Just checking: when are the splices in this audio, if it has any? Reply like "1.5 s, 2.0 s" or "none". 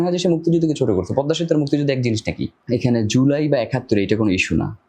2.5 s